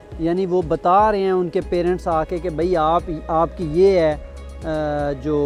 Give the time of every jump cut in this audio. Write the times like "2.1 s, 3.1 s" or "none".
none